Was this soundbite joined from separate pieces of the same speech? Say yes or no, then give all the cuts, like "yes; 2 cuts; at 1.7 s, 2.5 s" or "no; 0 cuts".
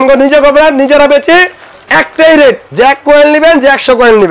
yes; 1 cut; at 2.6 s